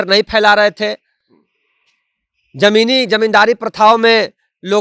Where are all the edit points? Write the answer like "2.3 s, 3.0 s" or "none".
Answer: none